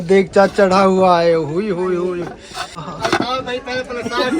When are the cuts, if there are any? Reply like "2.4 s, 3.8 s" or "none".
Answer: 2.8 s